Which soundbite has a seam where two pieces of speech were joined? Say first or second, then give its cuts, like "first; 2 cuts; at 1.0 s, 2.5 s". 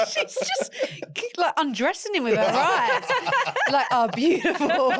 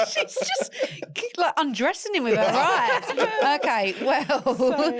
second; 1 cut; at 3.1 s